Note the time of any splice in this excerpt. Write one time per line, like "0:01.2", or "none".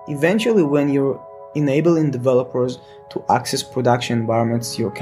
none